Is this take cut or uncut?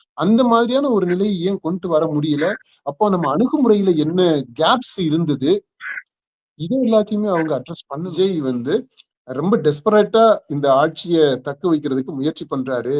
cut